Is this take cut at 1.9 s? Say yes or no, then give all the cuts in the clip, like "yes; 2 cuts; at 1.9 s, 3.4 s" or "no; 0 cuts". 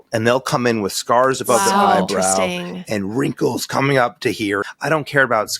no; 1 cut; at 4.7 s